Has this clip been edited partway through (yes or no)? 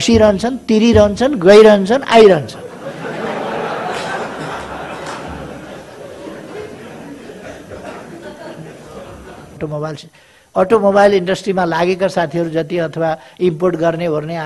yes